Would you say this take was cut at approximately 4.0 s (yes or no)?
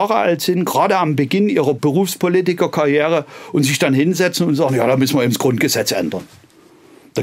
no